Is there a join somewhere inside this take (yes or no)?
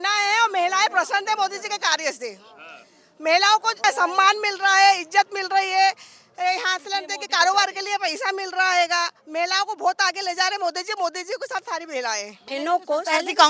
yes